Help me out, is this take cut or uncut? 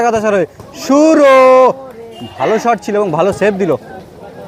uncut